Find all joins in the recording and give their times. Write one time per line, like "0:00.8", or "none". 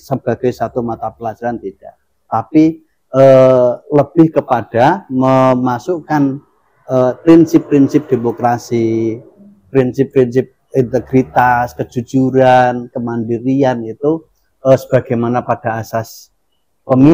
none